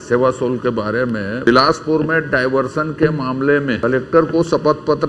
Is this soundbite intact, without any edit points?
no; 2 cuts; at 1.5 s, 3.8 s

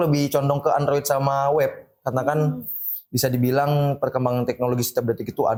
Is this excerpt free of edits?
yes; 0 cuts

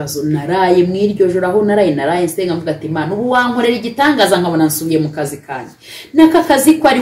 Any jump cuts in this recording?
no; 0 cuts

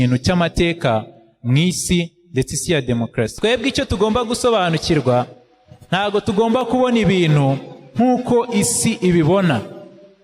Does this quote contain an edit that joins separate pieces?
yes; 1 cut; at 3.3 s

